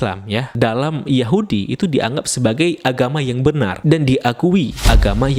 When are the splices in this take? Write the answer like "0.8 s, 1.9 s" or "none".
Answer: none